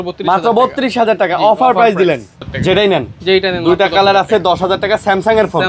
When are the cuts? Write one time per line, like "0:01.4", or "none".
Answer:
0:02.4